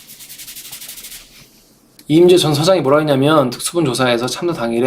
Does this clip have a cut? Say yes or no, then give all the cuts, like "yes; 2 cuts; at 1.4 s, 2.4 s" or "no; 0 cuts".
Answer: yes; 1 cut; at 1.9 s